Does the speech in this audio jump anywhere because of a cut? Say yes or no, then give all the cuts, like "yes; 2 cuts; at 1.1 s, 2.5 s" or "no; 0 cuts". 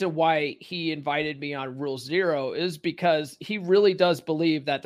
no; 0 cuts